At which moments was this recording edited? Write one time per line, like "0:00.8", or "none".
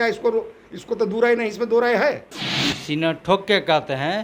0:02.4